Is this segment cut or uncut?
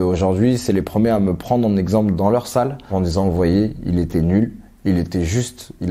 cut